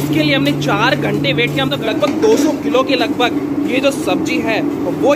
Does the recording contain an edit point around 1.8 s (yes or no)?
yes